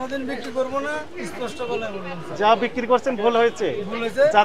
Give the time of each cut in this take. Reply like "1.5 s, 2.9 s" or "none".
none